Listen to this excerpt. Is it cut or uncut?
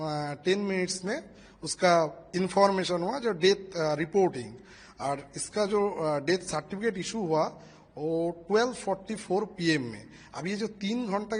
uncut